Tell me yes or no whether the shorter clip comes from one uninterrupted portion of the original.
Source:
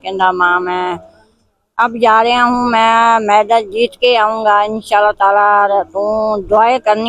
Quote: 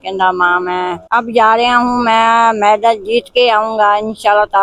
no